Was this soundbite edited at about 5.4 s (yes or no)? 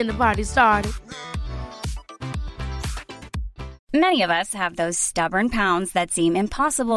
no